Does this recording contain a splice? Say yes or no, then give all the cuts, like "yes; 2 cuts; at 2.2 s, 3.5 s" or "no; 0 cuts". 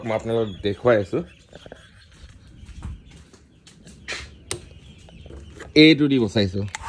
no; 0 cuts